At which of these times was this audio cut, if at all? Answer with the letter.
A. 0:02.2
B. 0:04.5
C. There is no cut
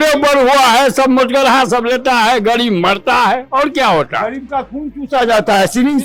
C